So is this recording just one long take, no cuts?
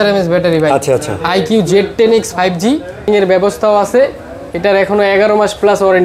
no; 1 cut; at 3.1 s

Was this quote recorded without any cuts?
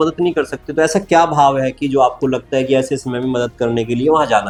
yes; 0 cuts

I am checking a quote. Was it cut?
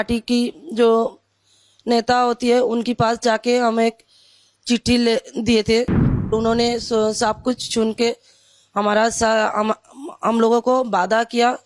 yes; 1 cut; at 6.3 s

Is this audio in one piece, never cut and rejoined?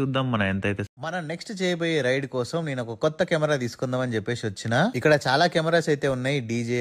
no; 1 cut; at 0.9 s

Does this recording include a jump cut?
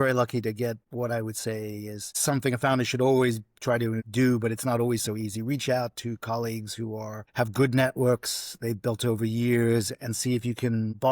yes; 3 cuts; at 0.9 s, 2.1 s, 4.0 s

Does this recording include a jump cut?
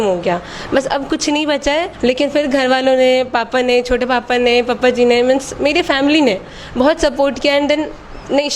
no; 0 cuts

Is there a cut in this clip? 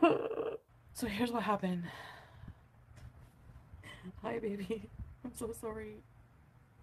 yes; 1 cut; at 1.3 s

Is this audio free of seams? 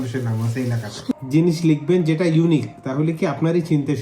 no; 1 cut; at 1.2 s

